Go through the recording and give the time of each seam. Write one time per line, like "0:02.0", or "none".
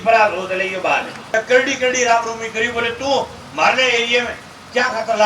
0:01.3